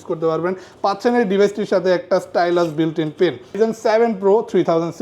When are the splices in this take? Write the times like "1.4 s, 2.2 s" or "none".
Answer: 3.6 s